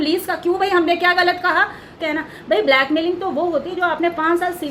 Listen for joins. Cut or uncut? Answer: cut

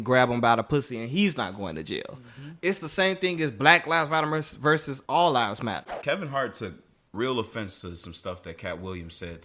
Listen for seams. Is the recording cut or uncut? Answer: cut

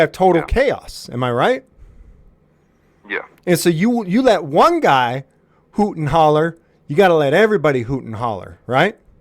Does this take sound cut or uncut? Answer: uncut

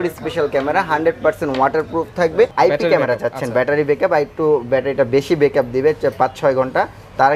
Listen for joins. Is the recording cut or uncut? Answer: cut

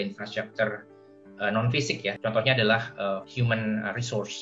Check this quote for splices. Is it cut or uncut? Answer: cut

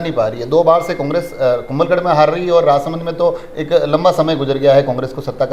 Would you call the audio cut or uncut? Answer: uncut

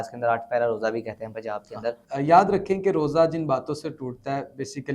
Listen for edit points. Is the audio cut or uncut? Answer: cut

